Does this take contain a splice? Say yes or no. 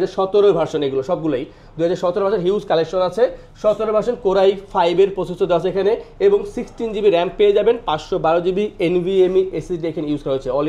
no